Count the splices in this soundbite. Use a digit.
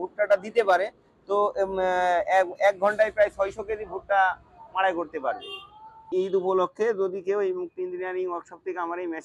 1